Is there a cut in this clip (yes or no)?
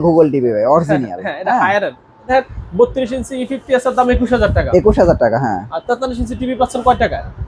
yes